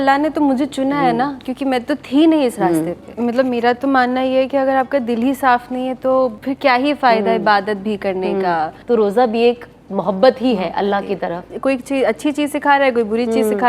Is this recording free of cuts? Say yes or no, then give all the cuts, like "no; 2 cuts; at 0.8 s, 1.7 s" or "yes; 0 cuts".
no; 4 cuts; at 3.0 s, 6.4 s, 8.8 s, 11.5 s